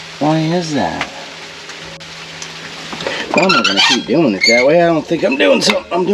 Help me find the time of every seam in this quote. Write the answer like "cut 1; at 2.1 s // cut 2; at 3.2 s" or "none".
cut 1; at 2.0 s